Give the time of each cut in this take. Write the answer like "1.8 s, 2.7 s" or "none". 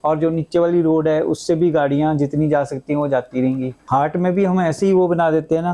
3.7 s